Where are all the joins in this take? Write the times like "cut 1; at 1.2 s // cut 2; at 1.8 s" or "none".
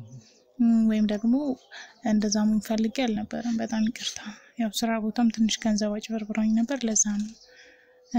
none